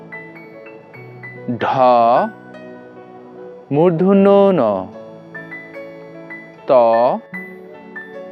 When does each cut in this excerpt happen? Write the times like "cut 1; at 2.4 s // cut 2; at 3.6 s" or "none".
none